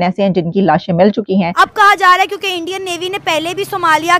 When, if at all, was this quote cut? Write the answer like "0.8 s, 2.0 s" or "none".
1.5 s